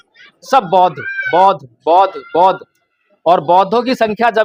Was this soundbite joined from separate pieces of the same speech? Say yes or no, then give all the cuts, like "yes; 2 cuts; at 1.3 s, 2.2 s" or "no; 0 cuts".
no; 0 cuts